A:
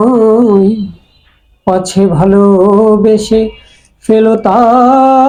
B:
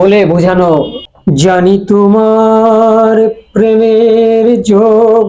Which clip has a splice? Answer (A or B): B